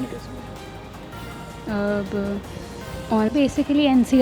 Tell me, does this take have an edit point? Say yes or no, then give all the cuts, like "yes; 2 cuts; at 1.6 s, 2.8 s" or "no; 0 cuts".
yes; 1 cut; at 3.3 s